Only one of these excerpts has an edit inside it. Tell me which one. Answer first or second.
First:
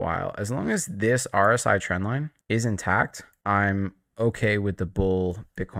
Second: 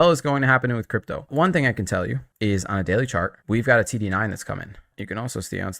second